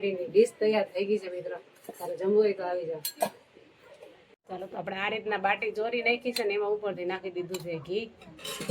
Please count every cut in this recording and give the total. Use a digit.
1